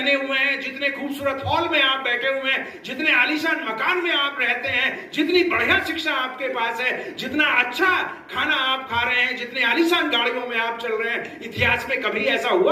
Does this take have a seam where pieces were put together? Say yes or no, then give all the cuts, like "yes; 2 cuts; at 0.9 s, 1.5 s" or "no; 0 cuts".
no; 0 cuts